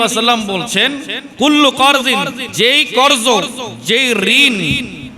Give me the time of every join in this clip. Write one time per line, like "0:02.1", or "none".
0:01.2
0:02.4